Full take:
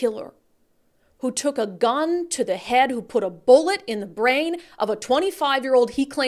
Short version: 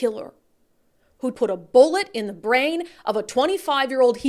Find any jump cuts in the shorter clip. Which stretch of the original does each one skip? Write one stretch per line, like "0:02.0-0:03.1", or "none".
0:01.3-0:03.1